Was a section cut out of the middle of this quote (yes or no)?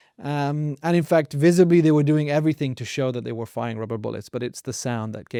no